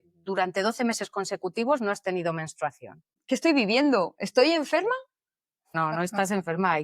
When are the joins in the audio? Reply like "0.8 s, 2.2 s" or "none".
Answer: 3.1 s, 5.7 s